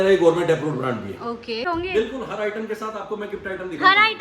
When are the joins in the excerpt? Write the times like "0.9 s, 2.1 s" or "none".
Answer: 1.6 s